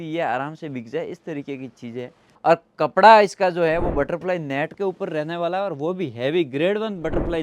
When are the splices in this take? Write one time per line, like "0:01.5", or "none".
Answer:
0:02.2